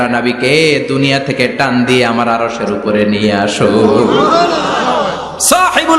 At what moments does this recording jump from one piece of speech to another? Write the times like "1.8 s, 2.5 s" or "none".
none

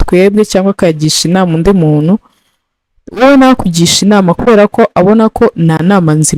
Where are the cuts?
none

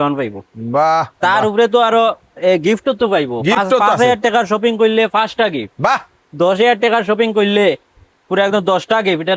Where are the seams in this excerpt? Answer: none

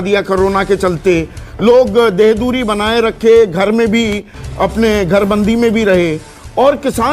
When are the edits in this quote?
none

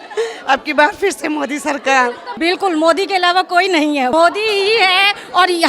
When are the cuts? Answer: 2.3 s, 4.1 s

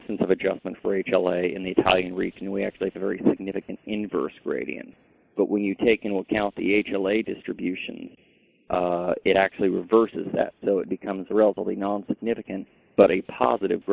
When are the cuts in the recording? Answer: 4.9 s

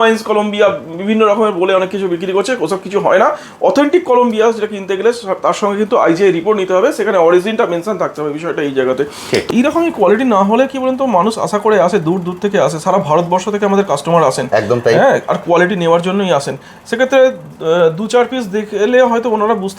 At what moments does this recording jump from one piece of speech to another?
9.5 s

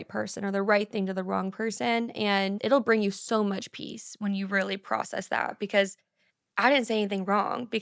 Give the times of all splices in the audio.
none

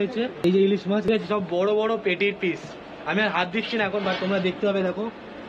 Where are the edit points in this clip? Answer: none

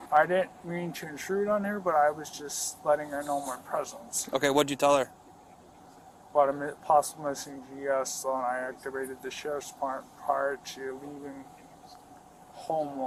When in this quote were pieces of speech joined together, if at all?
none

